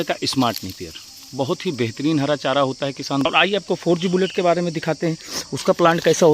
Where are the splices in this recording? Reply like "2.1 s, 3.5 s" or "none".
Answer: 3.3 s